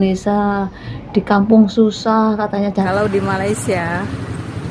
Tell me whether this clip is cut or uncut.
cut